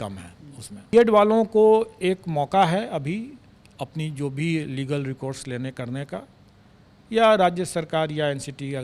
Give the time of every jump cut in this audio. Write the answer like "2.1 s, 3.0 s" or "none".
0.9 s